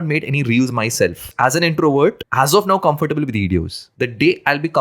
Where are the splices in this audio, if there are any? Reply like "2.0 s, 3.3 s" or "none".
1.2 s, 2.2 s, 3.8 s